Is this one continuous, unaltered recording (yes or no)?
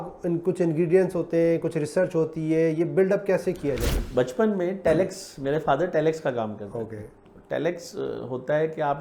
no